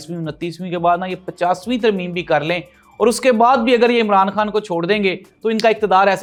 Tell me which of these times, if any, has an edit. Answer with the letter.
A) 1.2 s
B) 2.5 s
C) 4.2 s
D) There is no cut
D